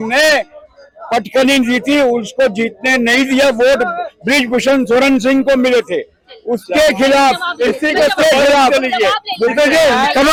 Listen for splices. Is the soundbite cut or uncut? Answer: uncut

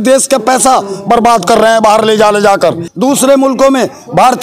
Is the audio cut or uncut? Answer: uncut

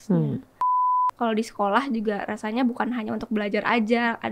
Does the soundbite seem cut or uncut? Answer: cut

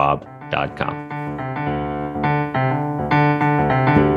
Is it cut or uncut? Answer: cut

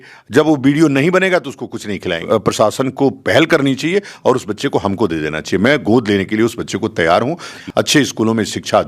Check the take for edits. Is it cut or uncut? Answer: cut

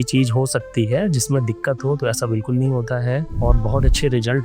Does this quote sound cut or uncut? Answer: cut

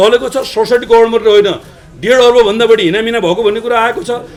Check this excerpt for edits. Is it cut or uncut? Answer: uncut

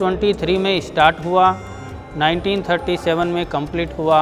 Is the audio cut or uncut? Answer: uncut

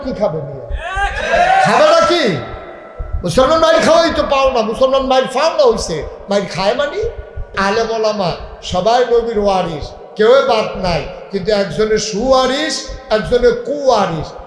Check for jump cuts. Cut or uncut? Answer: cut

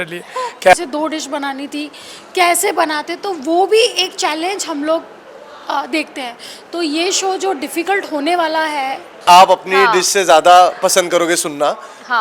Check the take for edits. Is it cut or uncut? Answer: cut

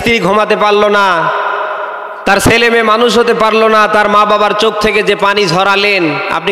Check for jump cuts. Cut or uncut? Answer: uncut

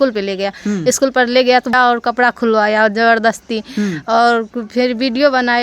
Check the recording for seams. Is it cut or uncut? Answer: cut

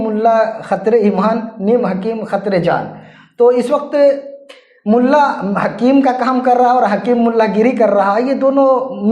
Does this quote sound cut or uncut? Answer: uncut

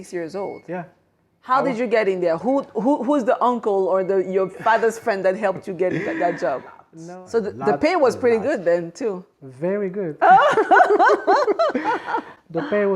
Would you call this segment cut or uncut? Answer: cut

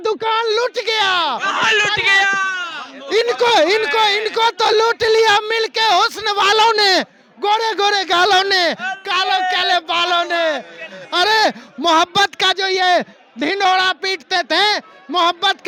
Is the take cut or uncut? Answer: uncut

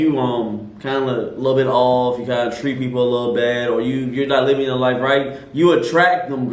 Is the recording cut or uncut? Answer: uncut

